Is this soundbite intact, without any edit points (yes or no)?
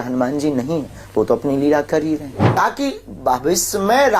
no